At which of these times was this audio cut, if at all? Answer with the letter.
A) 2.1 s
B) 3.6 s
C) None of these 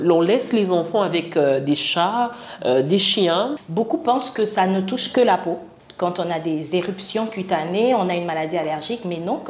B